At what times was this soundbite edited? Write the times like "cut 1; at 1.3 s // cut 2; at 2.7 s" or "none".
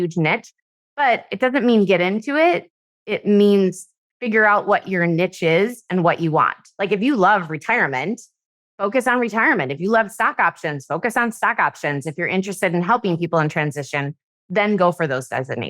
none